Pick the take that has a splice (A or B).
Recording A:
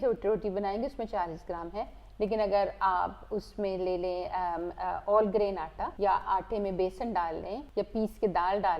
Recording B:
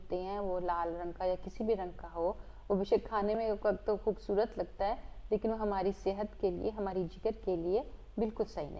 A